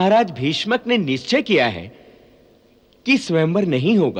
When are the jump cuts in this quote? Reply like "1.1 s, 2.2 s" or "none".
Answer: none